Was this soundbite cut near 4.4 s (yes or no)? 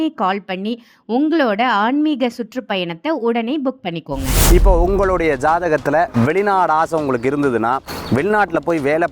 yes